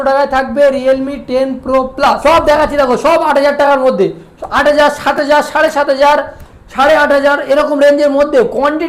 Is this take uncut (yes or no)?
no